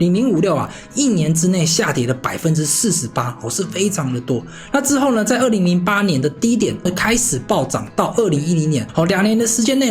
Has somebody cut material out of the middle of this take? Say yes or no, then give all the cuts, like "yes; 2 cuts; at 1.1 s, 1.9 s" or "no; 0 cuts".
yes; 1 cut; at 8.9 s